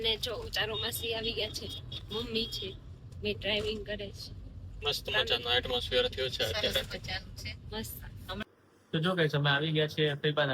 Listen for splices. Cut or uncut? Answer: cut